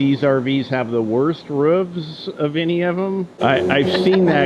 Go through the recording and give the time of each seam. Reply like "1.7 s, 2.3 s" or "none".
3.3 s